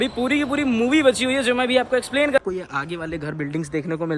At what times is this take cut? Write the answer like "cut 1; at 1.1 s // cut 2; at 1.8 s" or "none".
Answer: cut 1; at 2.4 s